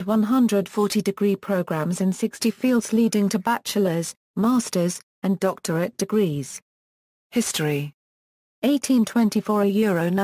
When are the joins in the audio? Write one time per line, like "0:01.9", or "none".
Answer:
0:05.9